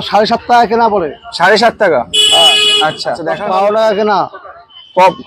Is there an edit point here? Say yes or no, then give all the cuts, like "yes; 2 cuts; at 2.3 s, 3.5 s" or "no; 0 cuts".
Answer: yes; 1 cut; at 3.3 s